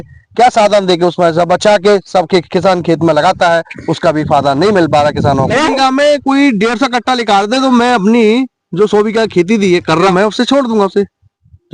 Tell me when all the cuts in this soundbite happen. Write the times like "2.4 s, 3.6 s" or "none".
5.6 s, 10.1 s